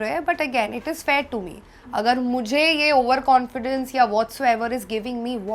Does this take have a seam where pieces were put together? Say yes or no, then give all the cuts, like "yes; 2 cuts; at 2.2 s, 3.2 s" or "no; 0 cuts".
no; 0 cuts